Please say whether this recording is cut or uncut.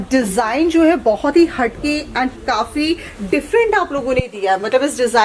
uncut